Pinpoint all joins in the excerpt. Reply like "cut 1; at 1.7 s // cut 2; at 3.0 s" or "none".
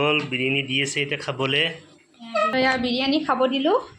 cut 1; at 2.5 s